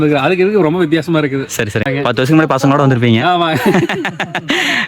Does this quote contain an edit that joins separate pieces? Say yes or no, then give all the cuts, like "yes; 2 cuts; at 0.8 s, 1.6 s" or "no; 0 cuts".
yes; 1 cut; at 1.8 s